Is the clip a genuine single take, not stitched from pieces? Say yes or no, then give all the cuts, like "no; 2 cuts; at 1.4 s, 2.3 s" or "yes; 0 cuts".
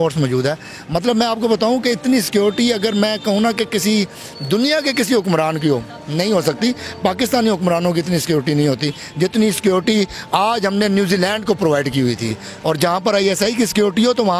no; 1 cut; at 12.5 s